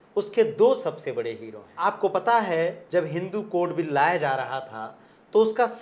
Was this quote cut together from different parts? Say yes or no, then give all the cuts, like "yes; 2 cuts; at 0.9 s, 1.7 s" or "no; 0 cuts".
yes; 1 cut; at 1.7 s